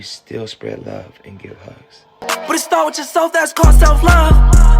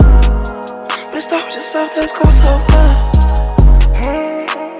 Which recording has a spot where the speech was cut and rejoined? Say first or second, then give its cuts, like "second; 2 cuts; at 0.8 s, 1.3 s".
first; 1 cut; at 2.2 s